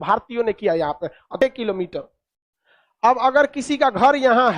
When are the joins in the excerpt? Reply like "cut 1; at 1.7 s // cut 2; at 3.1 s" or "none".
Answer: cut 1; at 1.3 s